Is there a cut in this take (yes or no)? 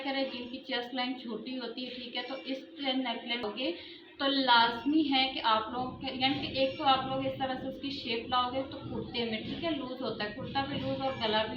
yes